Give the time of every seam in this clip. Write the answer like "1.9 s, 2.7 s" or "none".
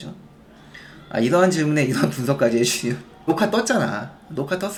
none